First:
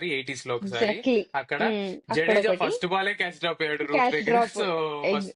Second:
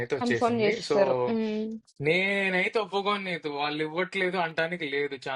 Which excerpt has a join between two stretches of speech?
second; 1 cut; at 1.8 s

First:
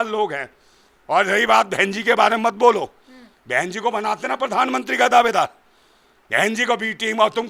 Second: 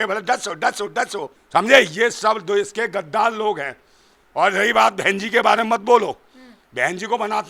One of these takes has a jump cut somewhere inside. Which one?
second; 1 cut; at 1.2 s

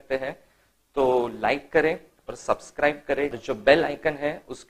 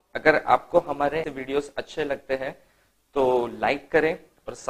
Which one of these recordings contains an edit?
second; 1 cut; at 1.3 s

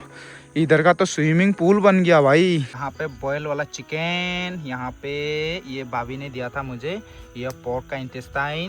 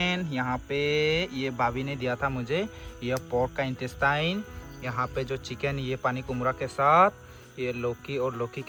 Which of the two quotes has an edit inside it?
first; 1 cut; at 2.8 s

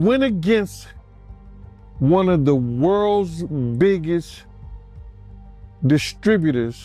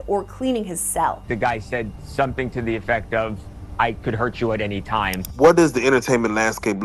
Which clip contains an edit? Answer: second; 2 cuts; at 1.2 s, 5.2 s

